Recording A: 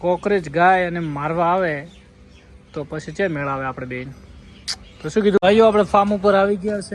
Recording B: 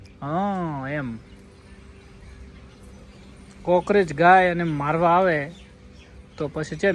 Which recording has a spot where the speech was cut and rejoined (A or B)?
A